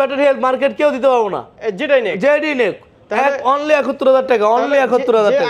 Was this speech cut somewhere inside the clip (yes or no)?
no